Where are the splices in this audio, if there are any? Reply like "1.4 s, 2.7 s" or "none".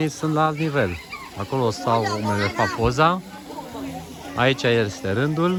none

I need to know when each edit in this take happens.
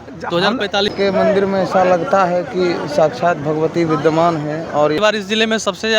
0.9 s, 5.1 s

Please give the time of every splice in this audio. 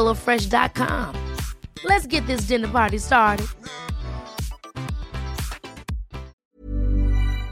6.4 s

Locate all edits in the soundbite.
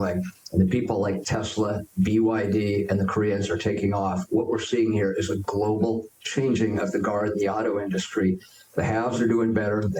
none

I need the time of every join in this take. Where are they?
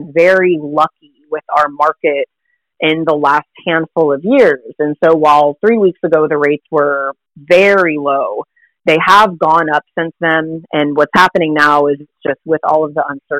none

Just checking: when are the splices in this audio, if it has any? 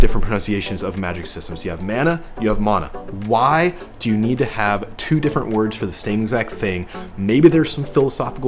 none

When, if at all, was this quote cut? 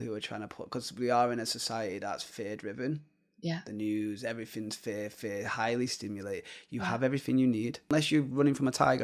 7.9 s

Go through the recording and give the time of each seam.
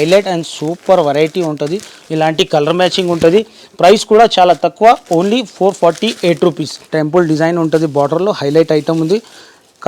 1.9 s, 6.7 s

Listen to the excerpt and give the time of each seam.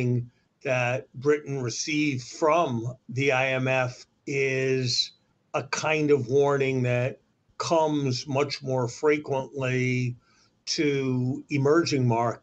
2.9 s, 4.1 s

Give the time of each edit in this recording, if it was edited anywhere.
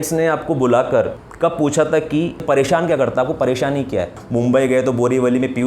1.2 s, 2.4 s, 4.2 s

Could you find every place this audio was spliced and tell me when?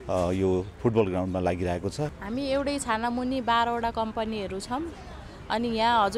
2.2 s

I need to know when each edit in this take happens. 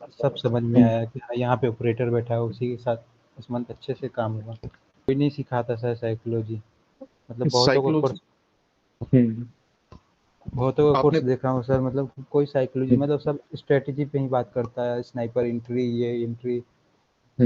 5.1 s

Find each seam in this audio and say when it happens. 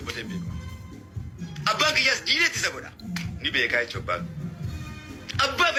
none

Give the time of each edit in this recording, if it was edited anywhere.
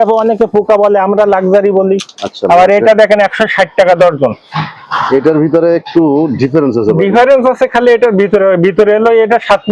none

